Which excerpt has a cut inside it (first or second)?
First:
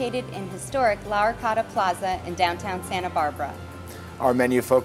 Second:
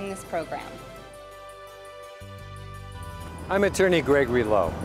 second